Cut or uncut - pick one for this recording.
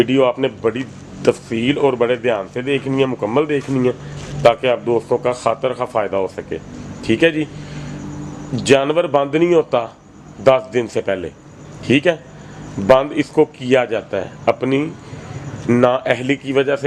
uncut